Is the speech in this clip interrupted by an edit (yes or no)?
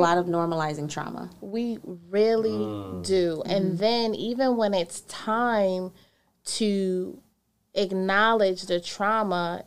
no